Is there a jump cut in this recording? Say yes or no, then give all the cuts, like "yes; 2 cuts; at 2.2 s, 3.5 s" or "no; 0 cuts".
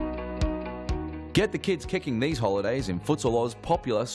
yes; 1 cut; at 1.2 s